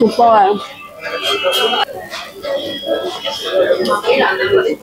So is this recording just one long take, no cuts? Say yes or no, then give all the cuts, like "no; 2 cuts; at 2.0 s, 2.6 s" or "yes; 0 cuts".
no; 1 cut; at 1.9 s